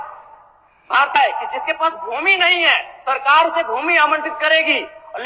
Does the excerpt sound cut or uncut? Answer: cut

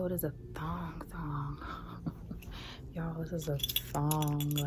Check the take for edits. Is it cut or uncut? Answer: uncut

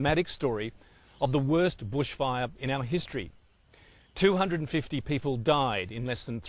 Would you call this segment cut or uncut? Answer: cut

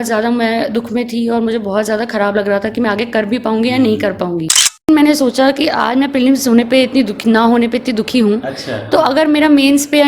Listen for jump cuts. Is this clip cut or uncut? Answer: cut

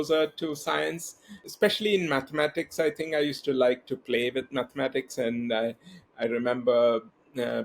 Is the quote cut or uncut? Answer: cut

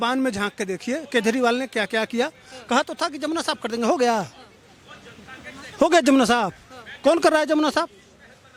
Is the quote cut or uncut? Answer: uncut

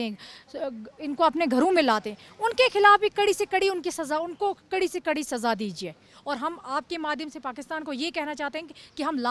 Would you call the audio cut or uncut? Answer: cut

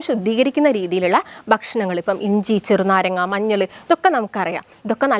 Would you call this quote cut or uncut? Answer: uncut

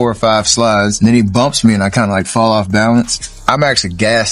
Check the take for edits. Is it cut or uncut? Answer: cut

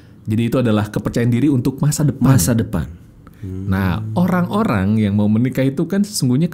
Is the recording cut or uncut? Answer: uncut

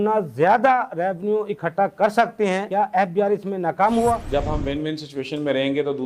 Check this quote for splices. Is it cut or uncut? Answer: cut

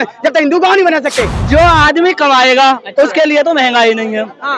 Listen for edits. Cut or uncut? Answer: cut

